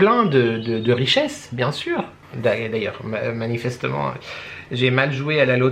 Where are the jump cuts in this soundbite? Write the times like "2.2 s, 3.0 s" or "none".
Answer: 2.0 s

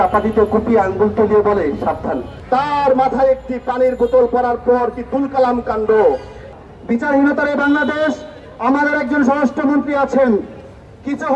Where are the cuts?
2.3 s, 6.5 s

